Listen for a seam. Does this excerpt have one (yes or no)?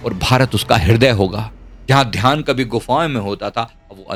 no